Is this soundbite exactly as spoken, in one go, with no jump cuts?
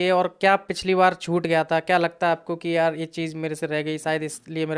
yes; 0 cuts

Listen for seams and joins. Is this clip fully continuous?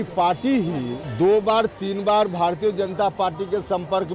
no; 1 cut; at 1.0 s

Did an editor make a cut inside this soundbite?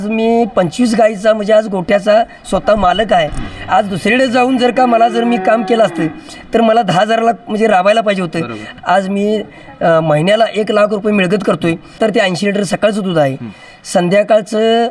yes; 2 cuts; at 8.7 s, 12.0 s

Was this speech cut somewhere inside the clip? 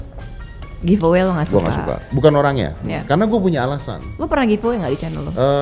yes; 1 cut; at 2.0 s

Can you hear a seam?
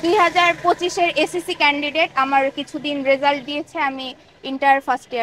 no; 0 cuts

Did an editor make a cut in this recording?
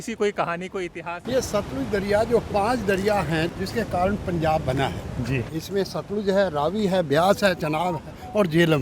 yes; 3 cuts; at 1.2 s, 3.5 s, 5.5 s

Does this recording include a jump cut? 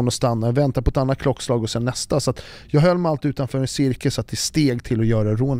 no; 0 cuts

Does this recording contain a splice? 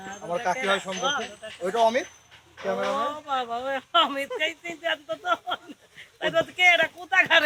no; 0 cuts

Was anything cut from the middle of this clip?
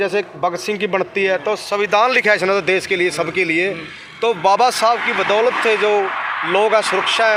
no; 0 cuts

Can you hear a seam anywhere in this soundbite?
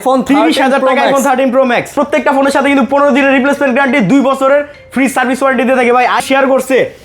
yes; 2 cuts; at 1.9 s, 6.2 s

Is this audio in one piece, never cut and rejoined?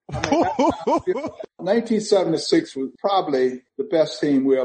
no; 3 cuts; at 1.6 s, 2.9 s, 3.7 s

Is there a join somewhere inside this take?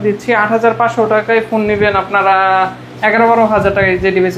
no; 0 cuts

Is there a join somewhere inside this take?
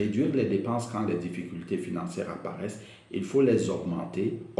no; 0 cuts

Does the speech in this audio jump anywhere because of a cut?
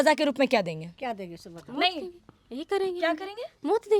no; 0 cuts

